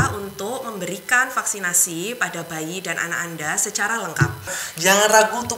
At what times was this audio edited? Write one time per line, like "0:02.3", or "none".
0:04.6

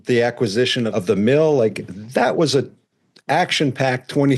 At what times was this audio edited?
0:00.9

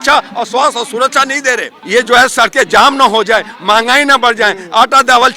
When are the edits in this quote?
0:01.7

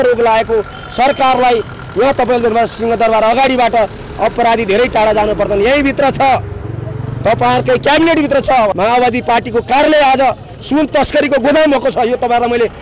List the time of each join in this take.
0:08.7

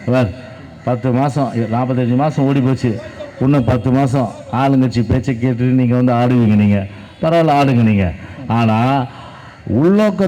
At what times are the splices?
none

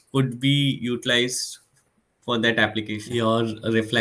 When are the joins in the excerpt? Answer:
0:03.0

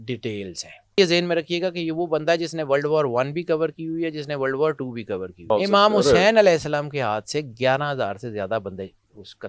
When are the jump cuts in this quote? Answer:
0:01.0
0:05.5

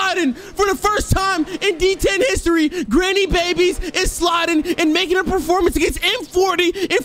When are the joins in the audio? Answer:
none

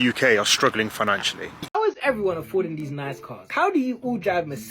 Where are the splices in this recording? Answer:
0:01.5

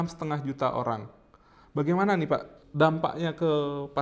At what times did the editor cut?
0:02.5

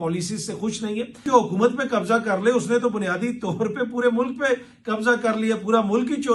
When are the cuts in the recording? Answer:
0:01.2

